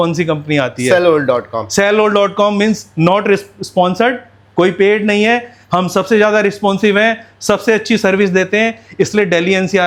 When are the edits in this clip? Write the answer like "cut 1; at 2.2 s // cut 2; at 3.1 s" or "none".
none